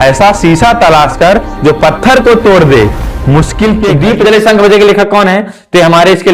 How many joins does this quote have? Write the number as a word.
one